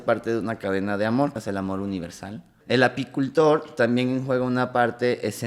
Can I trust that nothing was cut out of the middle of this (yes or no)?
no